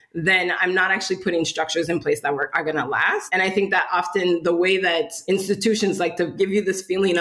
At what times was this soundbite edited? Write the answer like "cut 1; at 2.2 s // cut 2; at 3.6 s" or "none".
cut 1; at 3.3 s // cut 2; at 5.2 s // cut 3; at 6.3 s